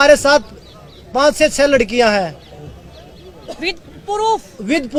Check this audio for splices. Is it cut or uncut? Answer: uncut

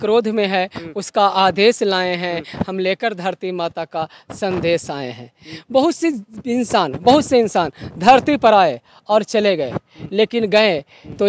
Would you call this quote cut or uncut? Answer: uncut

